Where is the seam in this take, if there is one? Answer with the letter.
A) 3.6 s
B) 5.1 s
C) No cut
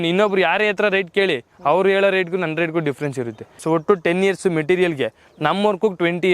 A